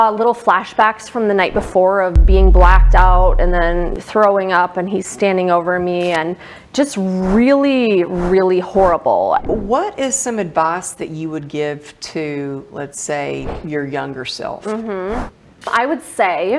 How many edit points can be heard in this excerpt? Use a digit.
2